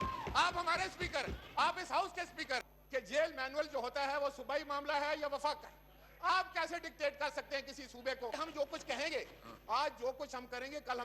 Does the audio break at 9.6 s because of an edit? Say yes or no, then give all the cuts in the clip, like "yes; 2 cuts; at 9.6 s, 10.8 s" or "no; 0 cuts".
no; 2 cuts; at 2.7 s, 8.3 s